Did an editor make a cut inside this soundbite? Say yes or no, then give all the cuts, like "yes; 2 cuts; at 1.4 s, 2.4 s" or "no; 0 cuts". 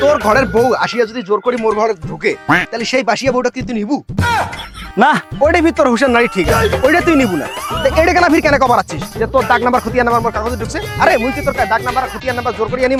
no; 0 cuts